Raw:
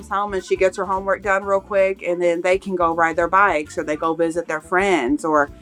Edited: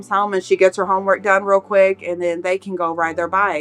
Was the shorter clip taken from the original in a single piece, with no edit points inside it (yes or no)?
yes